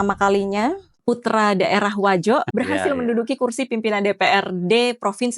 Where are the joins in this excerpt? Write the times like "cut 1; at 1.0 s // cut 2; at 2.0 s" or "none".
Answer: cut 1; at 0.9 s // cut 2; at 2.5 s